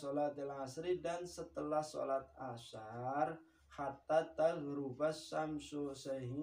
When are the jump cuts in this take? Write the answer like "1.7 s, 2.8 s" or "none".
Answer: none